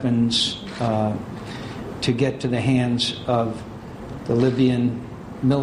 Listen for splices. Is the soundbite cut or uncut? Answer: uncut